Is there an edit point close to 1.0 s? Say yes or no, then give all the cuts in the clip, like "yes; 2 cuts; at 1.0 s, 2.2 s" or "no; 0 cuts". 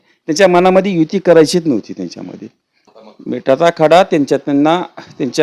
no; 1 cut; at 2.9 s